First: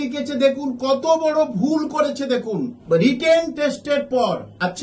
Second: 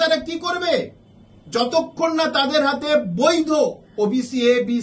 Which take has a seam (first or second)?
first